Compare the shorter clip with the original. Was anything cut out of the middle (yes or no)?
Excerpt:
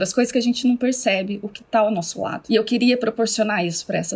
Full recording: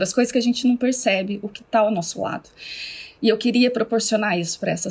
yes